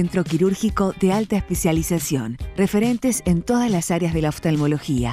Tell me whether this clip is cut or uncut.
uncut